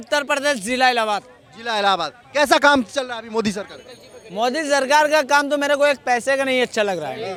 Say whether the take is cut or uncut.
uncut